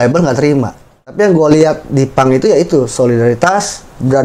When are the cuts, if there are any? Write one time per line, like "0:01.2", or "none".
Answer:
0:01.1